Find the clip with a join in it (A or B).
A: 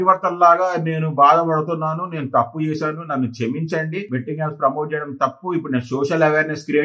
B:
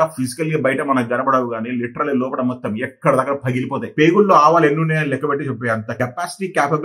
B